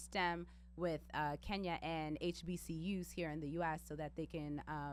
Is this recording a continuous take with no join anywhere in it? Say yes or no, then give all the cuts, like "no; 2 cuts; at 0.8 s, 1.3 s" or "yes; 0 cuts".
yes; 0 cuts